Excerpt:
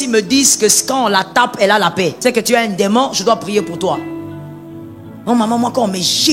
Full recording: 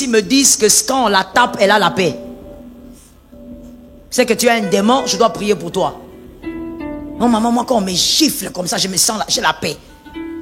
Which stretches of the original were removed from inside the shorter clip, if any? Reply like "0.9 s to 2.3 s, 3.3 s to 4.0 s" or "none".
2.2 s to 4.1 s